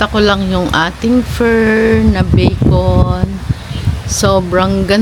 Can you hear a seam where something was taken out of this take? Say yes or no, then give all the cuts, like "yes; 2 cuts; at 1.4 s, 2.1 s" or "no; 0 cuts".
no; 0 cuts